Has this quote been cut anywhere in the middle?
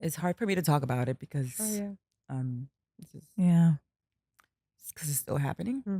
no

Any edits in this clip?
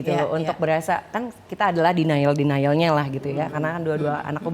no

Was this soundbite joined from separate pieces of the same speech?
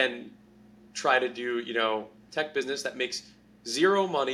yes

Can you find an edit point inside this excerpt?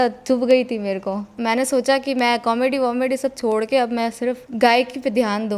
no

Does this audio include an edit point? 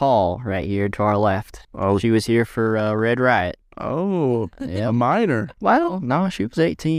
yes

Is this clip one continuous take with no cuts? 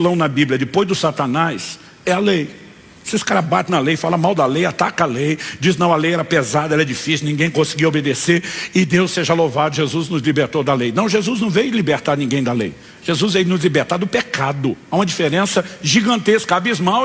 yes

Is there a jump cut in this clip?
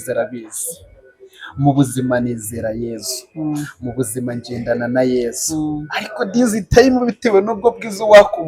no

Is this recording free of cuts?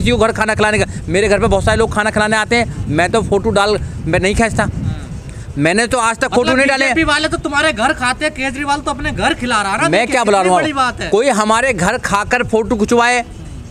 yes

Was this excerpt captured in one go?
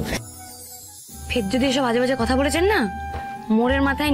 no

